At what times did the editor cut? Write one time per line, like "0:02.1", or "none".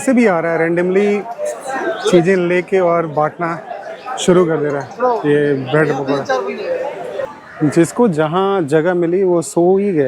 0:07.3